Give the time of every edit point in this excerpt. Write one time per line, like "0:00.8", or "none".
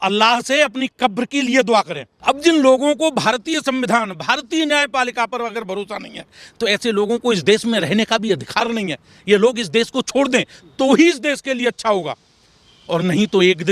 0:02.1